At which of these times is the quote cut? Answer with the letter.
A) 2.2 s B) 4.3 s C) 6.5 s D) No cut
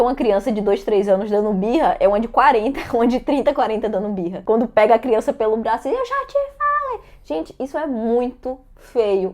B